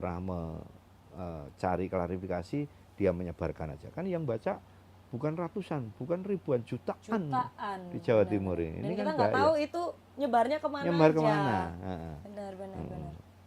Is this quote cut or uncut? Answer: uncut